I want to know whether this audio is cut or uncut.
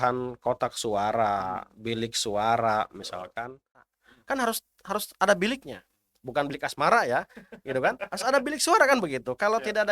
cut